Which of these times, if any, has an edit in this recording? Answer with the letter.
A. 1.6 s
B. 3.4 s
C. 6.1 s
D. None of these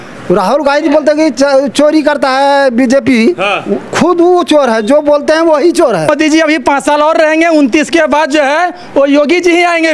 C